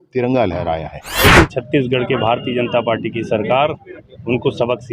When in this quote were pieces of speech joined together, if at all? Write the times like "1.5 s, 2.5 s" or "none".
1.2 s